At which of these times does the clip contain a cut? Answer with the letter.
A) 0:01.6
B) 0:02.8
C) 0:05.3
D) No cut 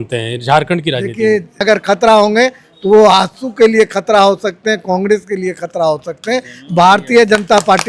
A